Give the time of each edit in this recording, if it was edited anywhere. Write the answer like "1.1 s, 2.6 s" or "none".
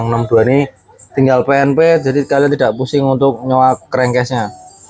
none